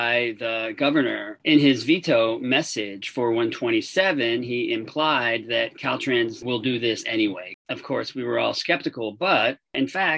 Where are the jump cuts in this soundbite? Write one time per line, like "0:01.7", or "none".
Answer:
0:01.4
0:07.5